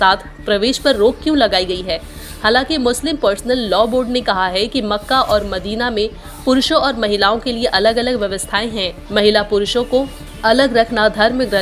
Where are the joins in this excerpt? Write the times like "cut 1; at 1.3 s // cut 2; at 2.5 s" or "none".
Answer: none